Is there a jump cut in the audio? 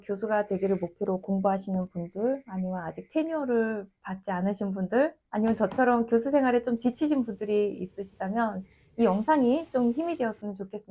no; 0 cuts

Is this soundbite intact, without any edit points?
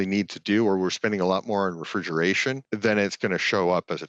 no; 1 cut; at 2.7 s

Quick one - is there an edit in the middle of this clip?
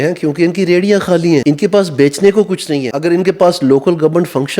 yes; 2 cuts; at 1.4 s, 2.8 s

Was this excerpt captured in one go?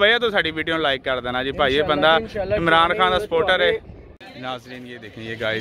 yes; 0 cuts

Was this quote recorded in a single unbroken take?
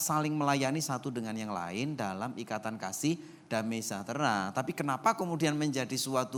yes; 0 cuts

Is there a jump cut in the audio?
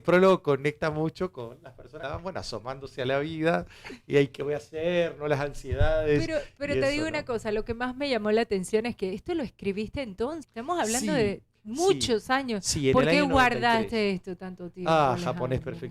yes; 2 cuts; at 1.9 s, 10.5 s

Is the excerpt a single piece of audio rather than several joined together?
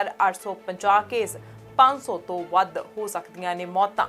yes; 0 cuts

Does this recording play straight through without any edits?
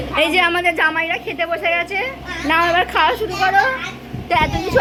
yes; 0 cuts

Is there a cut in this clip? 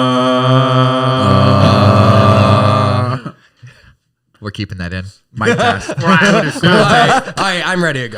no; 0 cuts

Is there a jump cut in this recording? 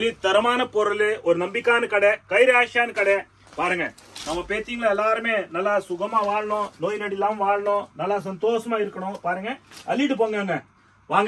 no; 0 cuts

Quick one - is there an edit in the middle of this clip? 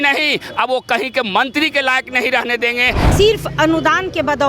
yes; 1 cut; at 3.0 s

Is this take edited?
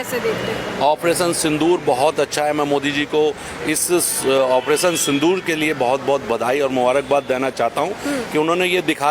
no; 0 cuts

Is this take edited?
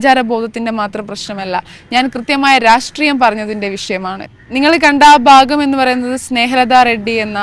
yes; 1 cut; at 4.2 s

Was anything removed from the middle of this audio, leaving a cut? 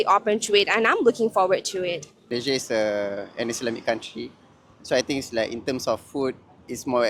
yes; 1 cut; at 2.1 s

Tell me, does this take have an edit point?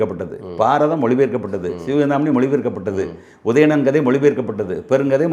no; 0 cuts

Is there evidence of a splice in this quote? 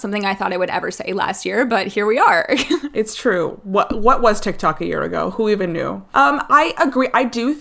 no; 0 cuts

